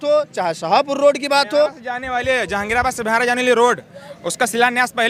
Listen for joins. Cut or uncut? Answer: uncut